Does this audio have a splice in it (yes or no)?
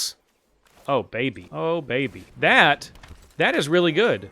yes